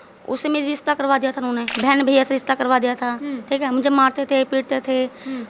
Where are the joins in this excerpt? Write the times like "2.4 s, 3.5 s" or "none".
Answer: 1.7 s